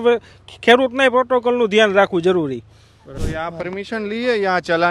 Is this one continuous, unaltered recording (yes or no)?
no